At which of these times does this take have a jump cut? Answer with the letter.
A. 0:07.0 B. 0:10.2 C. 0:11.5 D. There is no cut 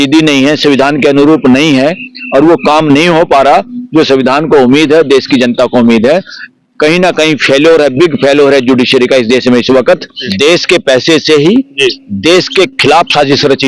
B